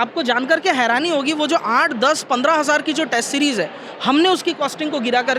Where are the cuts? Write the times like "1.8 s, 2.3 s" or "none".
none